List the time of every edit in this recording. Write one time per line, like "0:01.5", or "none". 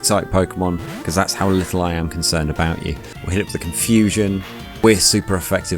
0:03.1
0:04.8